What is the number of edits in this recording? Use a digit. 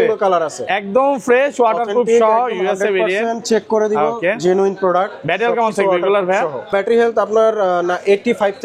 1